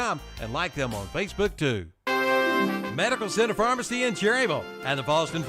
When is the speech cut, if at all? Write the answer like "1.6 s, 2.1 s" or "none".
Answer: 1.9 s